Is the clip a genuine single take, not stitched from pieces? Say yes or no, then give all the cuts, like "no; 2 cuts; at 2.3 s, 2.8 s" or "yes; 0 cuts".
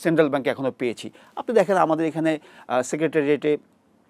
yes; 0 cuts